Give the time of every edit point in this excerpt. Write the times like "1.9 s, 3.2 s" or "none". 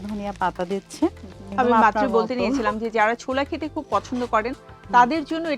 1.5 s